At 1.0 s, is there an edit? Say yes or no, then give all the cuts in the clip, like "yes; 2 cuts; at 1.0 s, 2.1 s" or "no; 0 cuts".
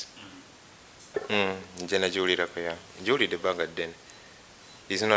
yes; 1 cut; at 1.0 s